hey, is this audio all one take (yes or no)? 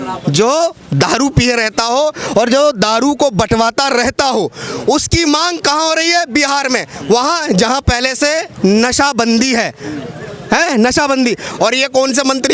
yes